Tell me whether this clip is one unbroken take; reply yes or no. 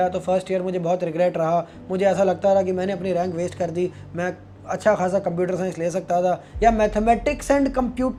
yes